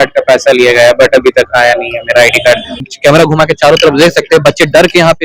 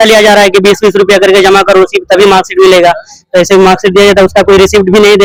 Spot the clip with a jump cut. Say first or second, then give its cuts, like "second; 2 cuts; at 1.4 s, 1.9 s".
first; 1 cut; at 2.8 s